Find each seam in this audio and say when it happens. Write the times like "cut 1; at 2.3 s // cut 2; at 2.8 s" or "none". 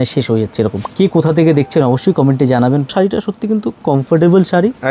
cut 1; at 0.8 s // cut 2; at 2.9 s